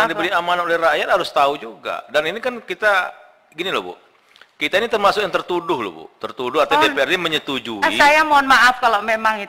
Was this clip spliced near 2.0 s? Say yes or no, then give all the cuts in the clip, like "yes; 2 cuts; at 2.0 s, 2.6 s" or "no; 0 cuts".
no; 0 cuts